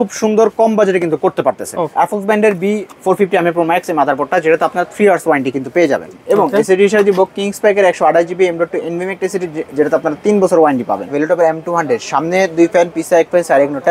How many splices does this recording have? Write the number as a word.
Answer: three